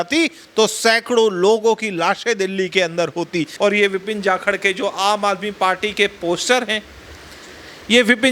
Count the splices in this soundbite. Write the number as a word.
one